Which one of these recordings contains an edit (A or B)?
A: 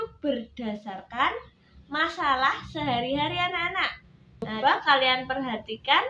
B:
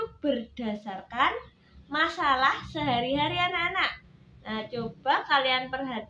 A